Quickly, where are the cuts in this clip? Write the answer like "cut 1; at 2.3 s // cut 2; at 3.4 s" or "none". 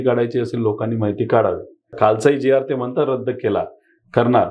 cut 1; at 1.9 s